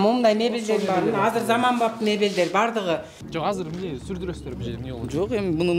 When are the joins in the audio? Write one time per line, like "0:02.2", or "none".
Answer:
0:03.2